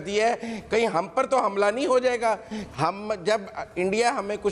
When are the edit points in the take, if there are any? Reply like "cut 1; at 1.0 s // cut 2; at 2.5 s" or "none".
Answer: cut 1; at 2.5 s